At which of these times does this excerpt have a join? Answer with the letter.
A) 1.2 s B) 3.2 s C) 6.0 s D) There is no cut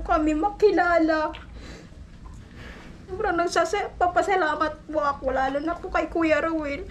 B